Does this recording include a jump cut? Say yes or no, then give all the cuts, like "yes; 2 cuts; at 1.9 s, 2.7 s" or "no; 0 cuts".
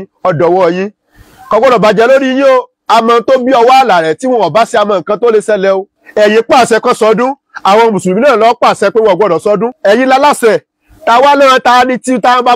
yes; 3 cuts; at 2.7 s, 5.9 s, 9.8 s